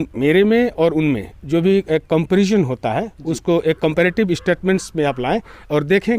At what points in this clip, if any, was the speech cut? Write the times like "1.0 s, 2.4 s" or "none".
none

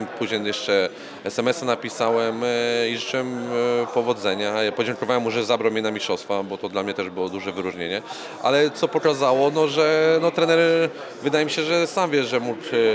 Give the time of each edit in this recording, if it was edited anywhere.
none

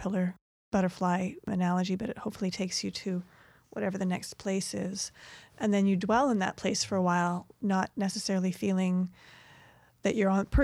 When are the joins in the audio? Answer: none

